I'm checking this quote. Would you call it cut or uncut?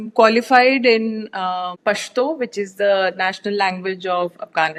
uncut